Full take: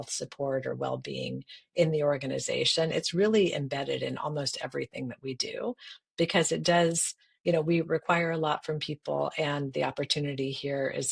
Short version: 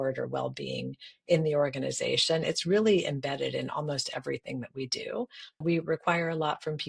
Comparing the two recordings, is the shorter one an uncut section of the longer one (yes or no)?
no